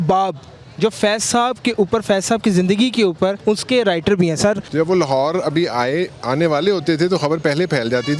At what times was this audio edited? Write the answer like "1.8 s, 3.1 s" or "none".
3.4 s, 4.6 s